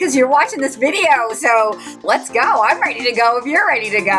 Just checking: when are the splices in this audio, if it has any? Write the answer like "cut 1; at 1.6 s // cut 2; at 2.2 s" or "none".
cut 1; at 2.0 s